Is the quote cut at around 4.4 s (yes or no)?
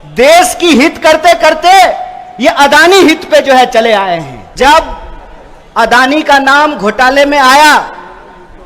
yes